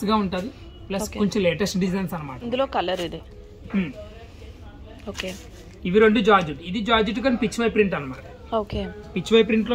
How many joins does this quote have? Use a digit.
1